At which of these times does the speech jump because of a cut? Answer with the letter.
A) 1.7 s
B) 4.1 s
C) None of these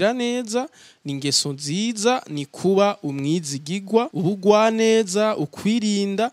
B